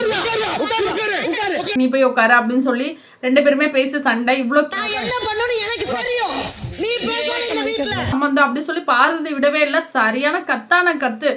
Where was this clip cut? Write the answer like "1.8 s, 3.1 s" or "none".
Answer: 1.7 s, 4.7 s, 8.1 s